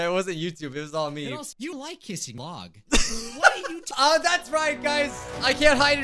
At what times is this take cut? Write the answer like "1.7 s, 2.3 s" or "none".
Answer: 1.5 s